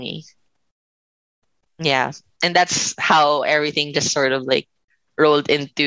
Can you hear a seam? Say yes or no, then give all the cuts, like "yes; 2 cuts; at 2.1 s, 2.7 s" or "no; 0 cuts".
no; 0 cuts